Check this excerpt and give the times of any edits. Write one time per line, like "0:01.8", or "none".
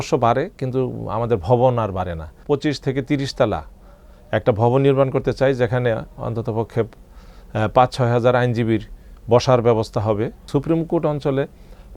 0:02.4
0:10.4